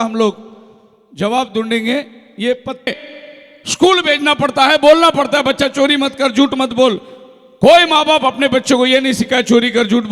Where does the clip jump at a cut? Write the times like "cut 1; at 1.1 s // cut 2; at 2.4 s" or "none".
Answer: cut 1; at 2.9 s